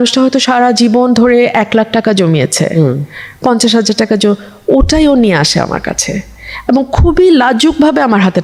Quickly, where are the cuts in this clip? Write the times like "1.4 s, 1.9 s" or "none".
none